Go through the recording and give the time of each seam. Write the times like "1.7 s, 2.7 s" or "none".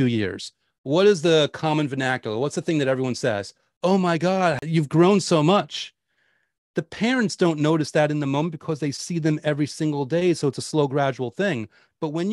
4.6 s

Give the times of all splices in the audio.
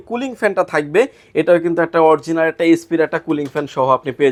none

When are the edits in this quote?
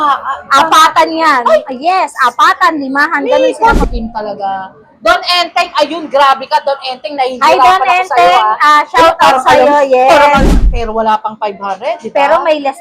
3.8 s, 10.6 s

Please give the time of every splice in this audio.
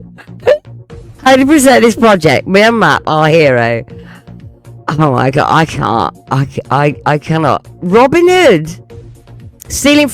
none

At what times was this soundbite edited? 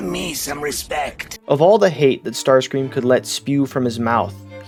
none

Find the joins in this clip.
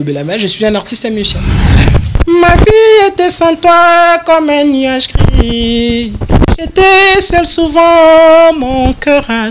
1.7 s

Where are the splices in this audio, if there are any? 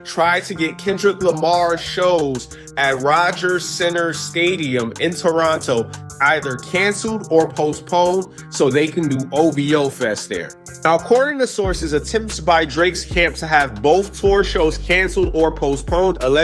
none

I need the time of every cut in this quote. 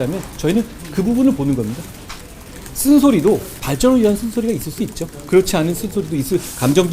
3.6 s

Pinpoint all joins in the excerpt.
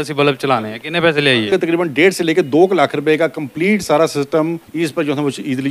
1.5 s, 4.6 s

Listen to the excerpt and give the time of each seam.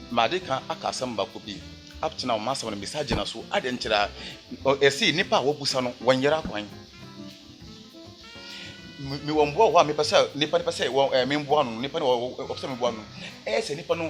none

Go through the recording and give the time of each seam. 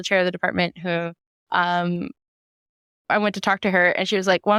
none

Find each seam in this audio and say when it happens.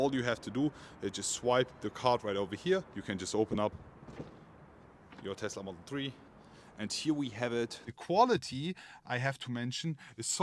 2.9 s, 6.3 s, 7.8 s

